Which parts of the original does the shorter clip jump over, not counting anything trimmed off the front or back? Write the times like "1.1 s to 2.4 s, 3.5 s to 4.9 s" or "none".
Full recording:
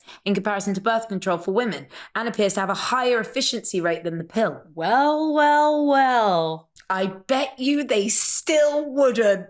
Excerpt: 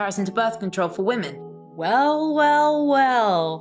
2.1 s to 4.6 s